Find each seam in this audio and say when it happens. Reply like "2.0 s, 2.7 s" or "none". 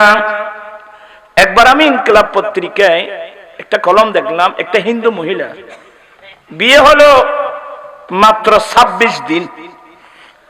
none